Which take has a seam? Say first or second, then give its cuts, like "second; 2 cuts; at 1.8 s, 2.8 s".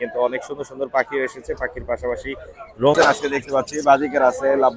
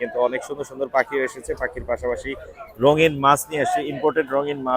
first; 1 cut; at 3.0 s